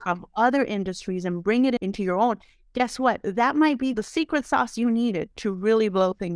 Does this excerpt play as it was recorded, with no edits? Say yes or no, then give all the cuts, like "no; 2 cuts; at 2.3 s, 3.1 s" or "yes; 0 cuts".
no; 1 cut; at 3.9 s